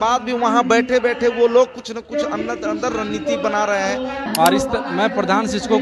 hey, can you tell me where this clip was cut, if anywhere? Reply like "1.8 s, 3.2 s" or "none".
4.2 s